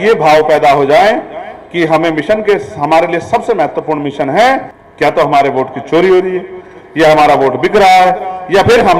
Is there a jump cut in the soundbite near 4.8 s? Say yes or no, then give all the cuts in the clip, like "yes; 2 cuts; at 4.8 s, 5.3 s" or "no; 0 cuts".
yes; 1 cut; at 4.8 s